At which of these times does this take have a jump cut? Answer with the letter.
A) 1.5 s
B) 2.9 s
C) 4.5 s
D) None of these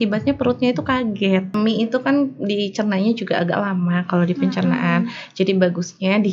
A